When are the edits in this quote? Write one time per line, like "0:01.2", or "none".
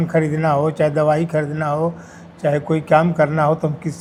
none